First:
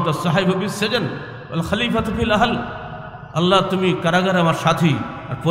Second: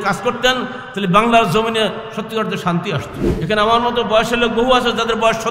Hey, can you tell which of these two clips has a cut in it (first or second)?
second